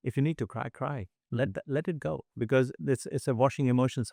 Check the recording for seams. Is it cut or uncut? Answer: uncut